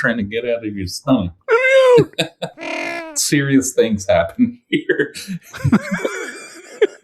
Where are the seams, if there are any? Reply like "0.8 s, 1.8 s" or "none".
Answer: 2.7 s